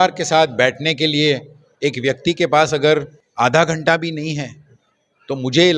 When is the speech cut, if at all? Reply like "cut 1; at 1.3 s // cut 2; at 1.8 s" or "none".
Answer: cut 1; at 3.2 s

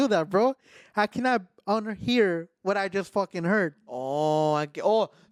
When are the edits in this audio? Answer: none

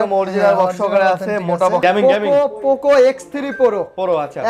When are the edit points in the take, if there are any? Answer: cut 1; at 1.8 s

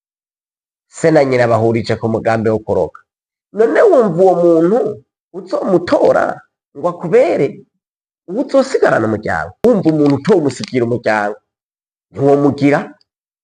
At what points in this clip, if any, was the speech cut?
cut 1; at 9.6 s

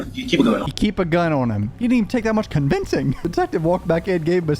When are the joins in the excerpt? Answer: cut 1; at 1.7 s // cut 2; at 3.2 s

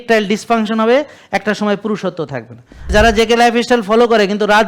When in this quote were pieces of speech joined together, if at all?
cut 1; at 2.9 s

